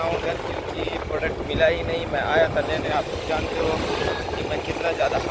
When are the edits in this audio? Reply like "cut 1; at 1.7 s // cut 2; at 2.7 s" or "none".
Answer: none